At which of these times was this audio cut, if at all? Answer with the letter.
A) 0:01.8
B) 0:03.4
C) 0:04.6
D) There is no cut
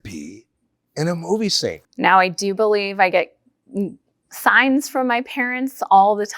A